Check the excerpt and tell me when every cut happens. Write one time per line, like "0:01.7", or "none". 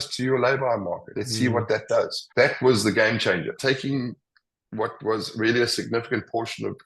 0:01.2
0:02.2
0:03.6